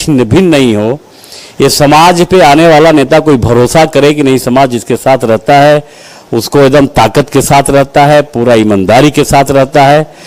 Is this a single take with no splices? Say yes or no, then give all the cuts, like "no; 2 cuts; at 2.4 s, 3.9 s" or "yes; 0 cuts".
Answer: yes; 0 cuts